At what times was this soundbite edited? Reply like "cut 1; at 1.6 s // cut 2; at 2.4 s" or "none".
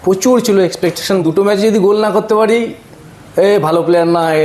cut 1; at 1.3 s